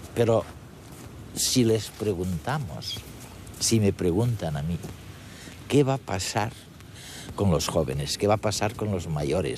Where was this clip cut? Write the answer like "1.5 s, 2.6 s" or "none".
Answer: 6.6 s